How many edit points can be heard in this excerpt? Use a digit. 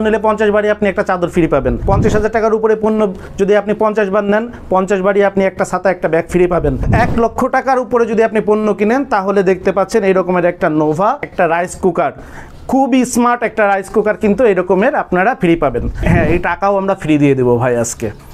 4